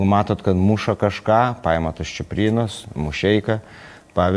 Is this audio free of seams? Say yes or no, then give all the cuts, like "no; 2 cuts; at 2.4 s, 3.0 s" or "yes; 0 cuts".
yes; 0 cuts